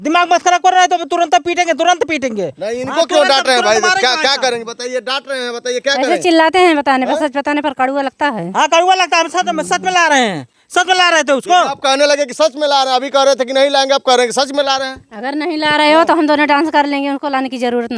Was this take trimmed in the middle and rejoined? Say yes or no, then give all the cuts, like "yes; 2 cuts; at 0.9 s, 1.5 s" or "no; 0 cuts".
no; 0 cuts